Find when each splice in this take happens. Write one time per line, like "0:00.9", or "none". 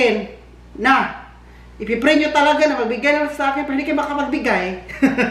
none